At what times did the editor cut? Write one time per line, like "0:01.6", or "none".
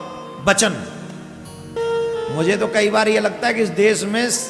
0:01.8

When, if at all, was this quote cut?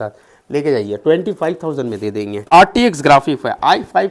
0:02.5

